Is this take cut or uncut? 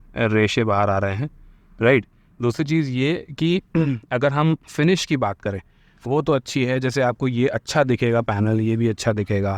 uncut